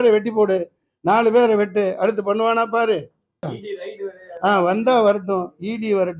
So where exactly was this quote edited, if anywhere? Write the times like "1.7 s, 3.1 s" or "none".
3.5 s